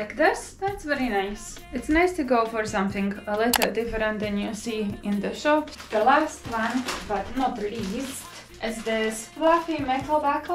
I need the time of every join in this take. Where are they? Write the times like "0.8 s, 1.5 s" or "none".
1.7 s, 5.7 s